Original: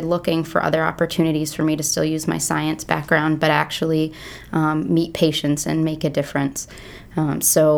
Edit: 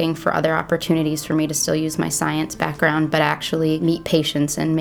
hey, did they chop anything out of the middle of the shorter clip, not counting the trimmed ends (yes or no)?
yes